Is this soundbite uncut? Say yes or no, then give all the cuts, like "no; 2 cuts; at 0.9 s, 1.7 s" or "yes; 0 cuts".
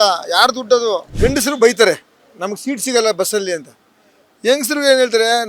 no; 1 cut; at 1.1 s